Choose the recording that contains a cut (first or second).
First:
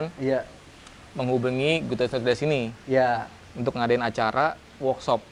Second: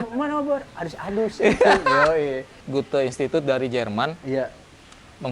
second